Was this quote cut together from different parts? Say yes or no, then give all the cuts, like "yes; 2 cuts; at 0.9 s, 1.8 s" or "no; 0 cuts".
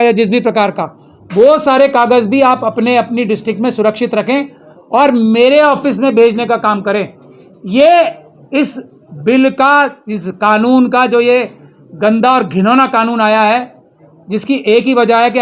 no; 0 cuts